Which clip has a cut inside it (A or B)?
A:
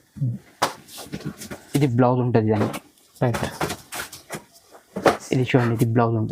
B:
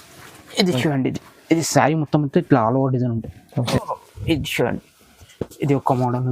B